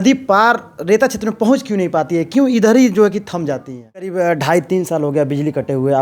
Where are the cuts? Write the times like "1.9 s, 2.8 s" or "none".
4.1 s